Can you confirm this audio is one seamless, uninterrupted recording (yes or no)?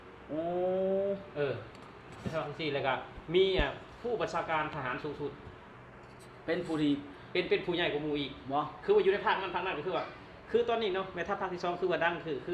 yes